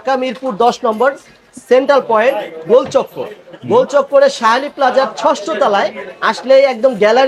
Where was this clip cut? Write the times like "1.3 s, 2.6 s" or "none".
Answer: none